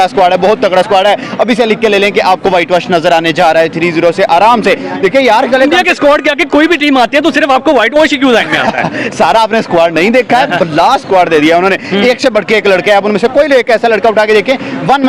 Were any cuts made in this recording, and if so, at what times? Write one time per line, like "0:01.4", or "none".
none